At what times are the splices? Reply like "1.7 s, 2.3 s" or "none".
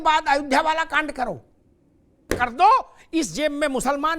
2.3 s

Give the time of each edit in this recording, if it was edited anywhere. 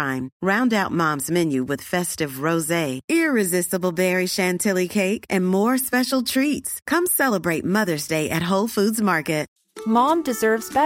none

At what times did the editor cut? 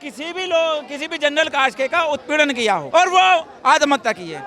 2.8 s

